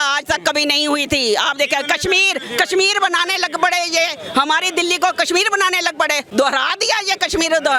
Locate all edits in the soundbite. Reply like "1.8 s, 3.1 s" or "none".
none